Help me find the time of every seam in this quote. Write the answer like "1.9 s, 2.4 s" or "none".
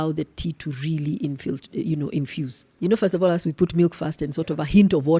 none